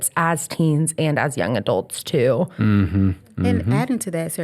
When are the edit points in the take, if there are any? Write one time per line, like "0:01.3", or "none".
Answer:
0:03.3